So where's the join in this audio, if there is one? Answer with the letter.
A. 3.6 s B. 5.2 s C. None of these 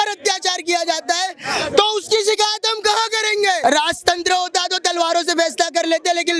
A